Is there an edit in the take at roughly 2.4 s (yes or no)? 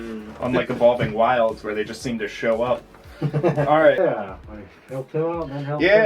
no